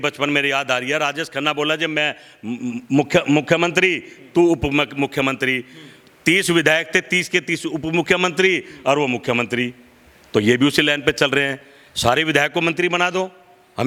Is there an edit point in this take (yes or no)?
no